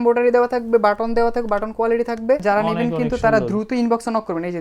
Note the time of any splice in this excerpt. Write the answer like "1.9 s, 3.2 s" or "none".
2.4 s